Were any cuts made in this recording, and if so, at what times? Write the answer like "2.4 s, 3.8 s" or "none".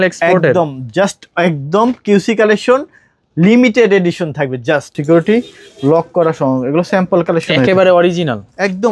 5.0 s